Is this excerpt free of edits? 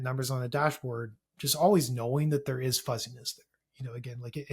yes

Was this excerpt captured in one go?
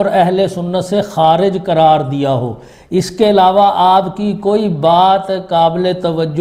yes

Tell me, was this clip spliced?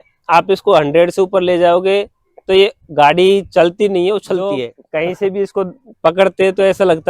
yes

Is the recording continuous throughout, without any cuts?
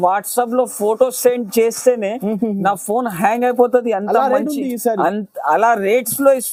yes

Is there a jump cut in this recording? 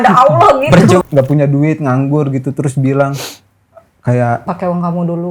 yes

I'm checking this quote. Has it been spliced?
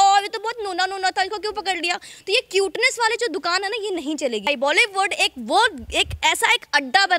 yes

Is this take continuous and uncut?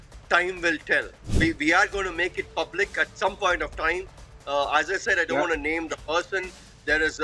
no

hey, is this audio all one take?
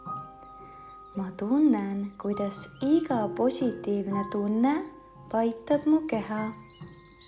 no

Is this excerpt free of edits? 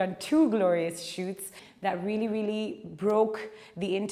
no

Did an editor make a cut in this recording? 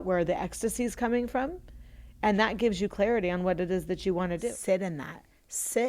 yes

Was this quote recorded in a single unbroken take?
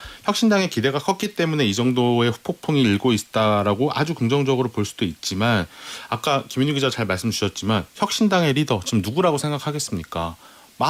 yes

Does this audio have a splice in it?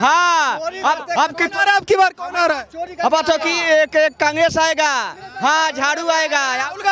no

